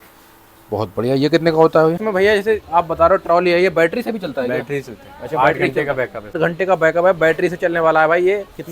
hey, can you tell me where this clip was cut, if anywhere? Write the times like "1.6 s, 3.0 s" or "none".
2.0 s, 6.4 s